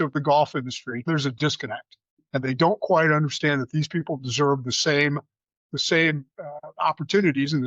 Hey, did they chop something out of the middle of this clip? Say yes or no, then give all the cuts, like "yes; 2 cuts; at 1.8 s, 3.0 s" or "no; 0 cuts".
yes; 1 cut; at 1.1 s